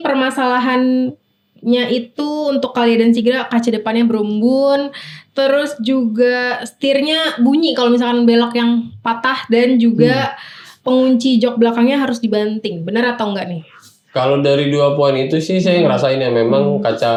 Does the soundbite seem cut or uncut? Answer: uncut